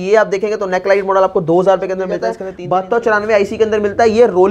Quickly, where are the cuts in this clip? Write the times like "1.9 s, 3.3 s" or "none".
2.5 s